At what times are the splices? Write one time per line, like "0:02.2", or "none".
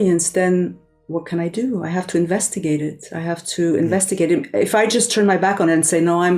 none